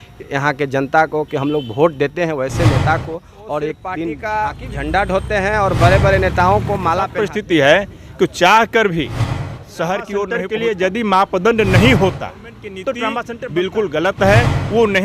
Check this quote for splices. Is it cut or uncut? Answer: cut